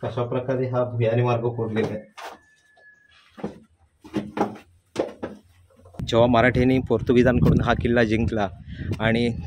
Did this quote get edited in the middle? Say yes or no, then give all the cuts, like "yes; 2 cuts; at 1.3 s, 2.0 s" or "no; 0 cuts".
yes; 1 cut; at 6.0 s